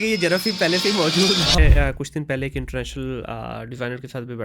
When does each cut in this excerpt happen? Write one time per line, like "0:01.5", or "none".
0:01.6